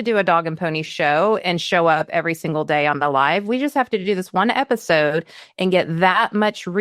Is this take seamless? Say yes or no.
yes